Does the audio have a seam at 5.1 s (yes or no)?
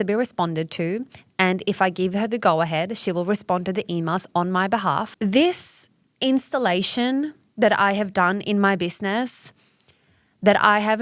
yes